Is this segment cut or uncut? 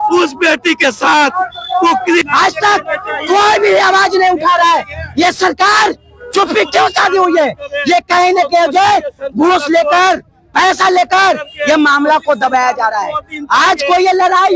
cut